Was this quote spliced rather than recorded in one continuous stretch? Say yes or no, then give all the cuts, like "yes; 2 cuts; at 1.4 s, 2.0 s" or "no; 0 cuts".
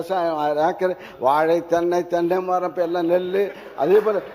no; 0 cuts